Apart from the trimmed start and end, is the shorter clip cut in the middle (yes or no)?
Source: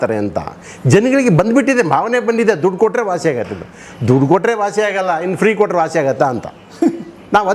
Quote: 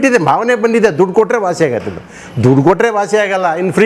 no